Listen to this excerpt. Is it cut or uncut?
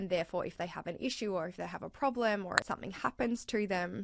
cut